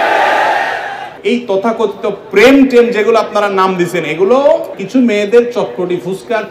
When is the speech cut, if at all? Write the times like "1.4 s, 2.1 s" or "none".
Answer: 1.0 s, 4.8 s

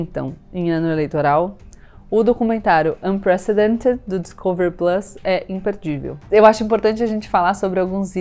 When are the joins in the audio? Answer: 6.2 s

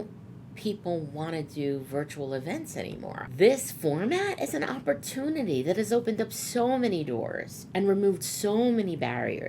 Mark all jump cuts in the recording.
3.2 s

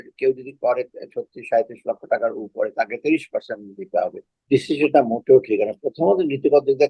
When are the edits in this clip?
4.3 s

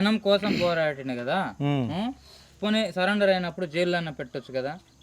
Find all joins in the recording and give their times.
none

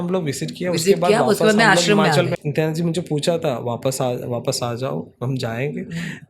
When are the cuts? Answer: 2.3 s

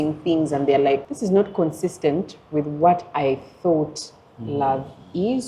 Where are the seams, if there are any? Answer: 1.1 s

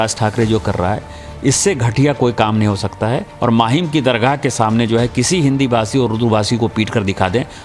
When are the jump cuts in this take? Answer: 3.3 s

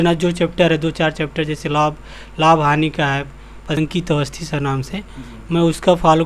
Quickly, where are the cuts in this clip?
3.8 s

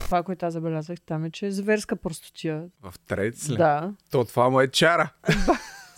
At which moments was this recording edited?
4.0 s

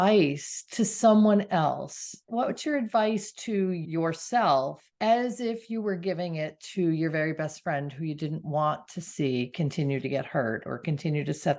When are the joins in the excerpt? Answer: 2.3 s, 3.8 s, 4.8 s

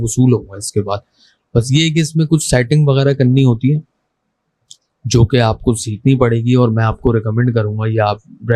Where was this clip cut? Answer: none

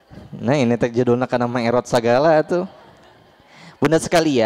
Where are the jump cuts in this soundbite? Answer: none

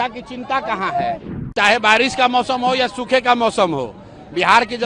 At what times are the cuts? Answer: 1.4 s

